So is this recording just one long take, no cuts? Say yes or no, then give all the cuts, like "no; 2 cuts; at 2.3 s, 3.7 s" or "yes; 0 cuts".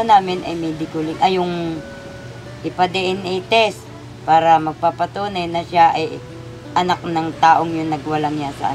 yes; 0 cuts